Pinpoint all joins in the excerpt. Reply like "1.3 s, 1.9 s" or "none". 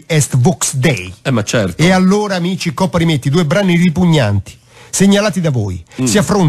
none